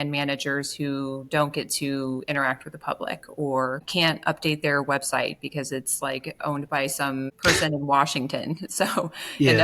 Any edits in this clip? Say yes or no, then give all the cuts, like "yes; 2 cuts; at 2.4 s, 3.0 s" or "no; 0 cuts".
yes; 2 cuts; at 3.8 s, 7.3 s